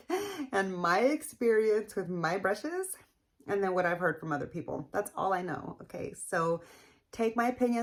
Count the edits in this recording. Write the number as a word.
zero